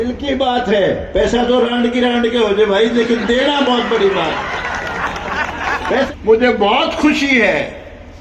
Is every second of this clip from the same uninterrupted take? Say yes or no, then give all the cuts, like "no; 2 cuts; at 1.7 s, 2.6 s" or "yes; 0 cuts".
no; 1 cut; at 6.1 s